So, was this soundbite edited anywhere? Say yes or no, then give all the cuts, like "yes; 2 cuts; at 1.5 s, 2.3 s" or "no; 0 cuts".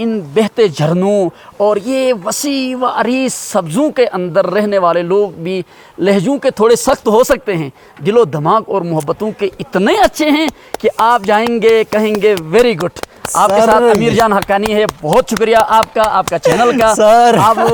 no; 0 cuts